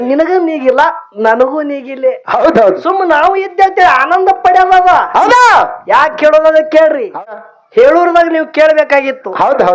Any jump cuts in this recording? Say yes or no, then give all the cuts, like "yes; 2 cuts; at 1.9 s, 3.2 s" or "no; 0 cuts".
yes; 1 cut; at 7.5 s